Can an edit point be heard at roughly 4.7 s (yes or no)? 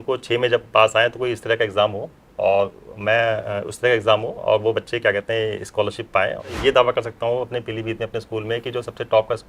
no